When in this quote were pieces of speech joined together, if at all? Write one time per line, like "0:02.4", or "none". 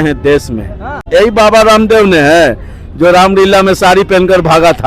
0:01.0